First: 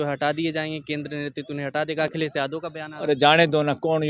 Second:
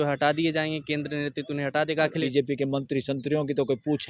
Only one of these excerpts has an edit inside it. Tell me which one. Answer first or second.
second